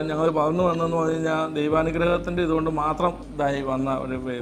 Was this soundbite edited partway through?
no; 0 cuts

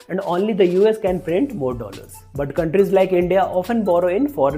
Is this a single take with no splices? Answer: yes; 0 cuts

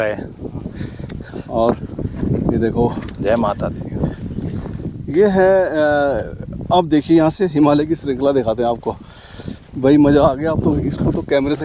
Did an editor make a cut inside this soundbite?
no; 0 cuts

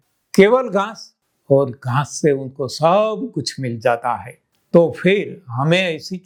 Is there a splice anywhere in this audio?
no; 0 cuts

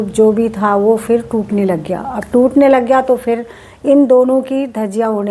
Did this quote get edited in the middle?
no; 0 cuts

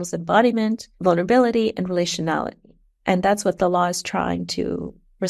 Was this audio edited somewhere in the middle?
no; 0 cuts

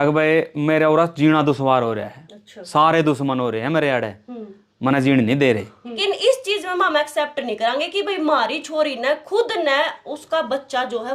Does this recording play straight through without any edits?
no; 1 cut; at 6.0 s

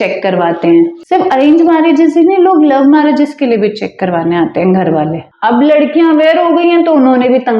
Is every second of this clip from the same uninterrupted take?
no; 2 cuts; at 1.0 s, 5.3 s

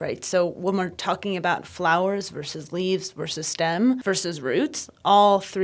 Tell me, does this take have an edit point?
yes; 1 cut; at 4.0 s

